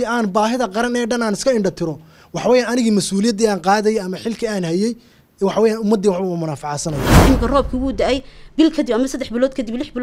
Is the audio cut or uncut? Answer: cut